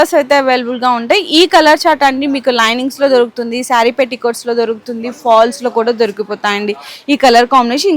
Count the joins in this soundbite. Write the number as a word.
zero